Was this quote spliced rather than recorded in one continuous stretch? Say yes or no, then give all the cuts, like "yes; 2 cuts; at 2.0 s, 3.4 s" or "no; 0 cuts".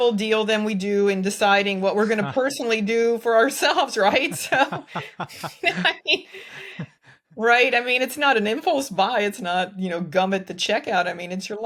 no; 0 cuts